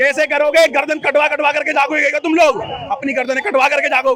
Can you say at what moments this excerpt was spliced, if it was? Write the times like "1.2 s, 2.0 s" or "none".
none